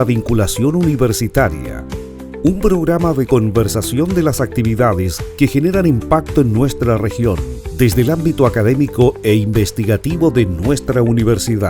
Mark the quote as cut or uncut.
uncut